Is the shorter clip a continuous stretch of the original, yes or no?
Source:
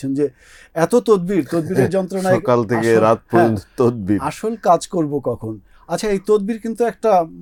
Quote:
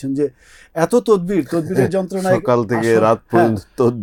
yes